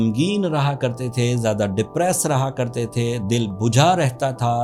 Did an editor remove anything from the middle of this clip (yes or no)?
no